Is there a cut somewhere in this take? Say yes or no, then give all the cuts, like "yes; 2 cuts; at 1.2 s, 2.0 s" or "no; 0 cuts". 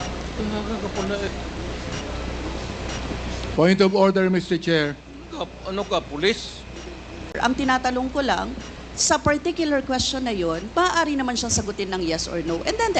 yes; 1 cut; at 7.3 s